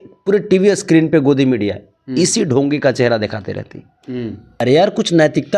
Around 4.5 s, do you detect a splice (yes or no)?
yes